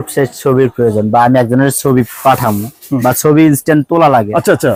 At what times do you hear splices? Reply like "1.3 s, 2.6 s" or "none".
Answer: none